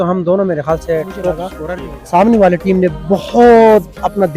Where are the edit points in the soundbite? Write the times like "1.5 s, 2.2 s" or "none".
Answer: 1.6 s